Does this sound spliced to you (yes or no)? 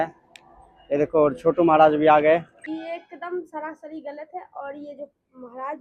yes